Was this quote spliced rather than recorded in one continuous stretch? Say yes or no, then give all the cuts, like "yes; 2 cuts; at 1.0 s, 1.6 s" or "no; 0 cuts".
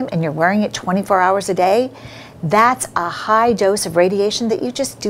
no; 0 cuts